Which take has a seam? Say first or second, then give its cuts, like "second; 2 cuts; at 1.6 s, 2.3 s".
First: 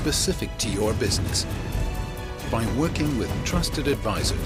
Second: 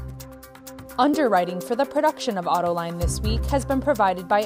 second; 1 cut; at 0.9 s